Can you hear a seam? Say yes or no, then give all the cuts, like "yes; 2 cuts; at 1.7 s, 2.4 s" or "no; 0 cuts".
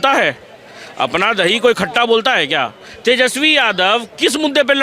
no; 0 cuts